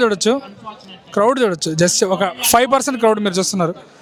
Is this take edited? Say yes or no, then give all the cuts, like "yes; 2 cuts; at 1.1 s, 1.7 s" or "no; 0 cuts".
no; 0 cuts